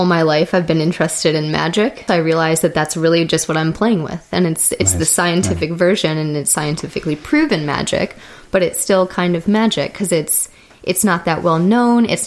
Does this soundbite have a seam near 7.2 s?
no; 1 cut; at 2.0 s

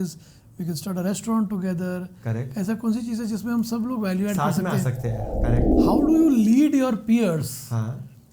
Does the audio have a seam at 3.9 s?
no; 1 cut; at 5.7 s

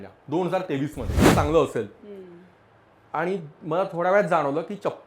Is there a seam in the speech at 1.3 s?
yes; 1 cut; at 1.3 s

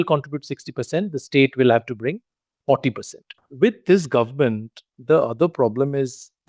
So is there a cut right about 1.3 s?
no; 1 cut; at 3.4 s

